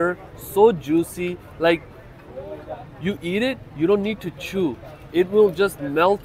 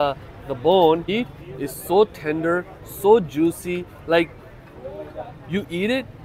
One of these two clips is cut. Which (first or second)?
second